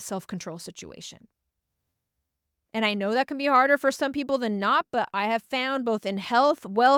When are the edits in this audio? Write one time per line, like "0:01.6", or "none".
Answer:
none